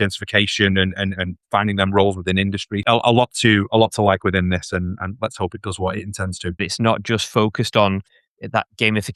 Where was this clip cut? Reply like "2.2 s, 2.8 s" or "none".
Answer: 2.8 s, 6.7 s, 8.2 s